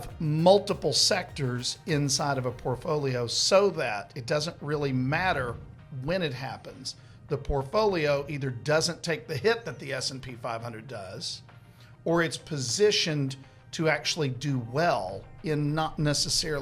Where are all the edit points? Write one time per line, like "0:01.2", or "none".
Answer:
none

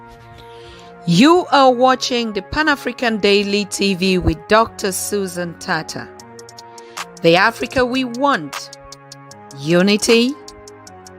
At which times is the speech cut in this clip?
0:01.3

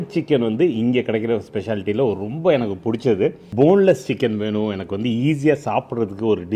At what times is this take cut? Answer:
none

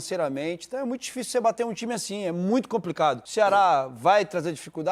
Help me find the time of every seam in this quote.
0:03.2

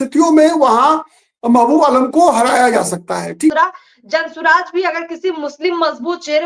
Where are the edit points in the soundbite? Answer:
0:03.5

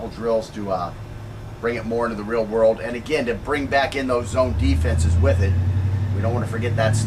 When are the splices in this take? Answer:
0:04.3

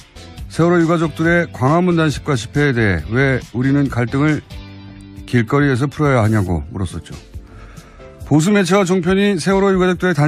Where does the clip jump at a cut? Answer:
none

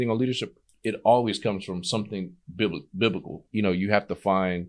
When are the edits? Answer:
0:03.4

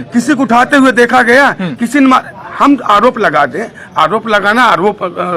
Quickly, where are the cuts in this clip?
none

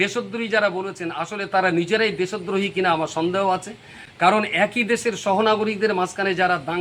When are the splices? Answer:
none

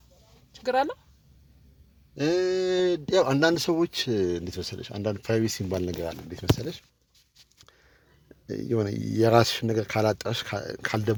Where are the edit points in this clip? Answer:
none

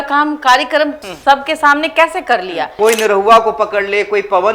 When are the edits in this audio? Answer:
0:01.1
0:02.7

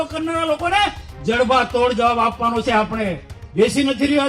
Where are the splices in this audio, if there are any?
none

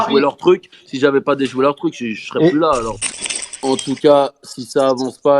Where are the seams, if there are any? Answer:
0:03.2

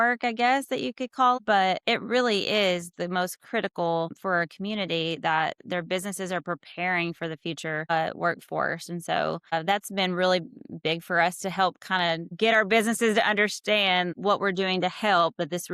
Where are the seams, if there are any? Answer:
0:01.4

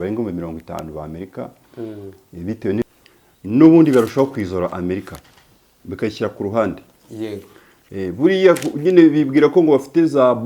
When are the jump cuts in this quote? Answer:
0:02.8

